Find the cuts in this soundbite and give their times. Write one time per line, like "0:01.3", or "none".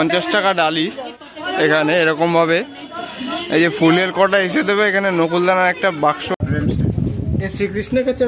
0:06.3